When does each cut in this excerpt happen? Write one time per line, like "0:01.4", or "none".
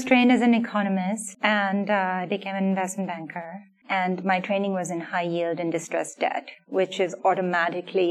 none